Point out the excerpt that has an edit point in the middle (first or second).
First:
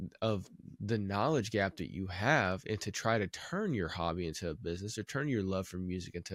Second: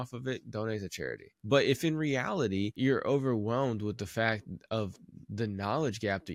second